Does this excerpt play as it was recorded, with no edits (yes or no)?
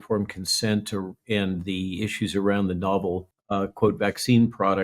no